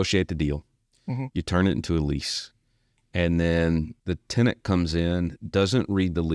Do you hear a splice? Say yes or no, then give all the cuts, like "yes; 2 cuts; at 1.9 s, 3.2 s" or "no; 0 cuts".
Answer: no; 0 cuts